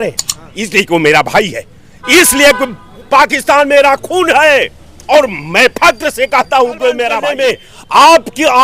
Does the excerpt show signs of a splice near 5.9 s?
no; 1 cut; at 7.3 s

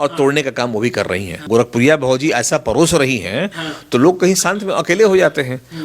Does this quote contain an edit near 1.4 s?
yes; 1 cut; at 1.4 s

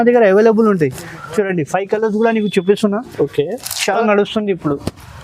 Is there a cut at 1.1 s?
no; 1 cut; at 3.8 s

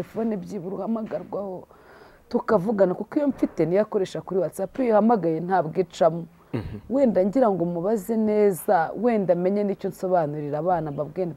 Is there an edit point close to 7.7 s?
no; 0 cuts

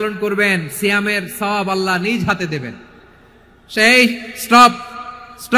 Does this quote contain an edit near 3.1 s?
no; 0 cuts

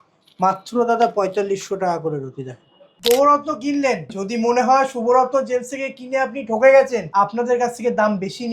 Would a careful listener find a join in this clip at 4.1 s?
yes; 3 cuts; at 2.9 s, 4.1 s, 7.0 s

